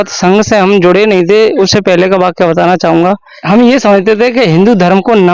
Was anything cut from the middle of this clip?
yes; 1 cut; at 3.3 s

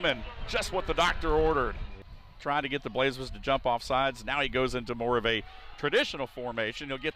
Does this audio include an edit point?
no; 0 cuts

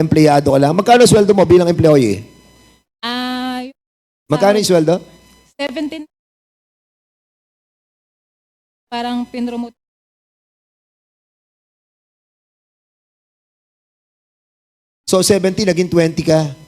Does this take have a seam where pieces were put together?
no; 0 cuts

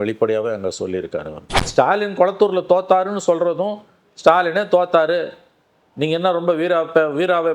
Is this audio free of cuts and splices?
no; 1 cut; at 1.6 s

